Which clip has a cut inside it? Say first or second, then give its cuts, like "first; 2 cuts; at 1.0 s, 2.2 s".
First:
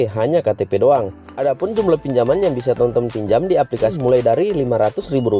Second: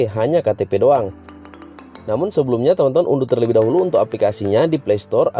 first; 2 cuts; at 1.2 s, 3.9 s